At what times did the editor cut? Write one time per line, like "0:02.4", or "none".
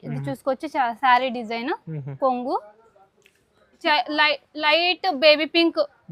0:03.8